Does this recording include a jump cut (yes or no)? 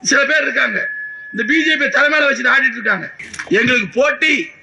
yes